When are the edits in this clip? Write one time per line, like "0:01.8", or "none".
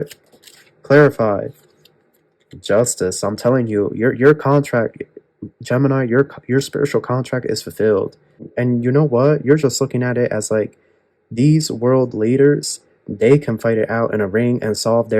0:08.5